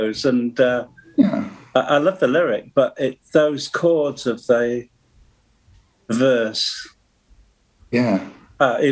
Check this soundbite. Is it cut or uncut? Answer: uncut